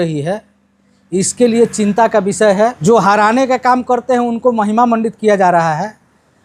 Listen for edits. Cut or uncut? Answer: cut